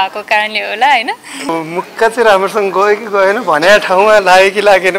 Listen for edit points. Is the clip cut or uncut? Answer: cut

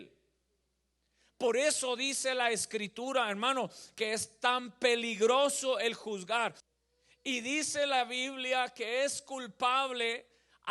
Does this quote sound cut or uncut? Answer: cut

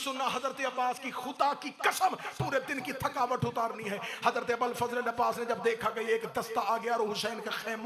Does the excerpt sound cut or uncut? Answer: uncut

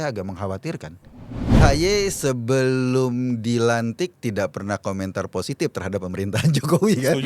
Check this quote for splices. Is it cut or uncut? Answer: cut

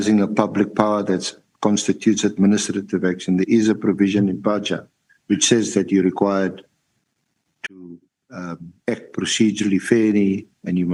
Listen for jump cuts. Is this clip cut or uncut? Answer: uncut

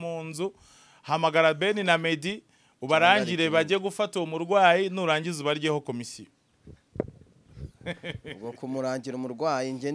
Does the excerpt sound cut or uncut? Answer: uncut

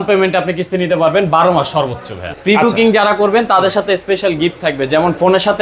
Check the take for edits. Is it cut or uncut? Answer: cut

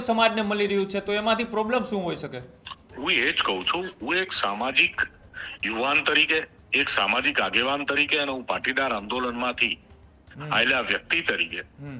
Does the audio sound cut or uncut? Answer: uncut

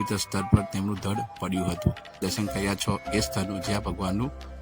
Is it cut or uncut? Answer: cut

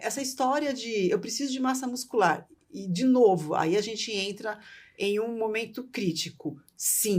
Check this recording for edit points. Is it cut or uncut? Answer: uncut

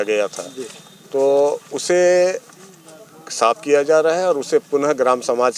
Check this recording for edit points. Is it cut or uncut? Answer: uncut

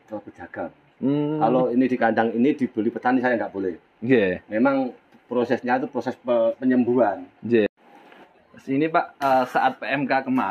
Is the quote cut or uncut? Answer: cut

